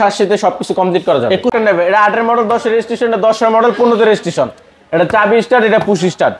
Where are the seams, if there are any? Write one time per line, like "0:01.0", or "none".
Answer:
0:01.5